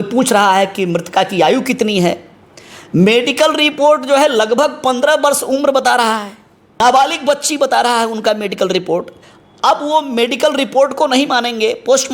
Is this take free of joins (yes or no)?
no